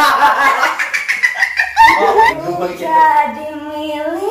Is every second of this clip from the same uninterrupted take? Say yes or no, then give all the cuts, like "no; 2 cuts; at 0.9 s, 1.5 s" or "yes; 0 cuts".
no; 1 cut; at 2.3 s